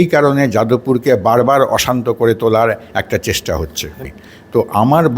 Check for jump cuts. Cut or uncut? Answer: cut